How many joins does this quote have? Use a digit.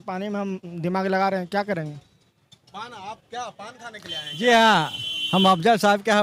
0